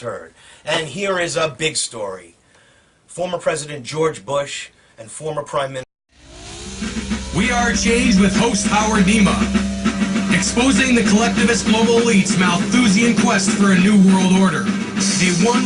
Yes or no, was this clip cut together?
no